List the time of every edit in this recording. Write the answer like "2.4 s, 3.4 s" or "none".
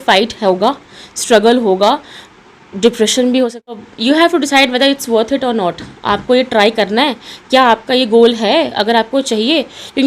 3.7 s